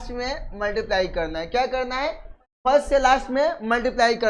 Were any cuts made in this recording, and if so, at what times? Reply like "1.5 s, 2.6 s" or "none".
none